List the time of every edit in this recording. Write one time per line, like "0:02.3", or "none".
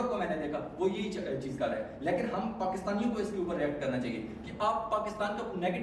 none